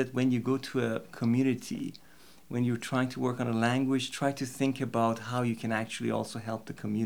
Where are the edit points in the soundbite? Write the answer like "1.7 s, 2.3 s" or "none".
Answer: none